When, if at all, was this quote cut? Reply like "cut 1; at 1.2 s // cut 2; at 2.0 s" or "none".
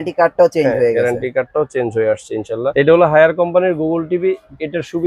cut 1; at 2.7 s